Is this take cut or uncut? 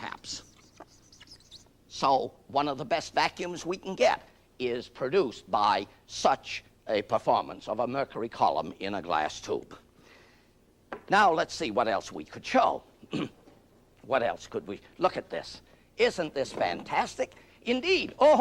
cut